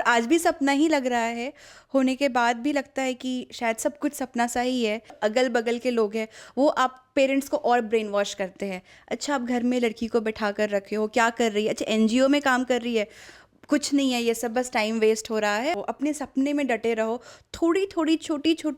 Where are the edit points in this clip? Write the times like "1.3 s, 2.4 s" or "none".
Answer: 5.1 s, 15.7 s